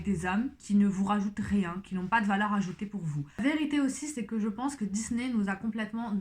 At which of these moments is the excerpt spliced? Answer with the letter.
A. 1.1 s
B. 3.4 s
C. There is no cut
B